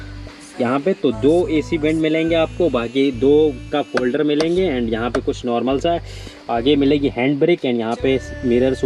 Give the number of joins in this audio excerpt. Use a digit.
0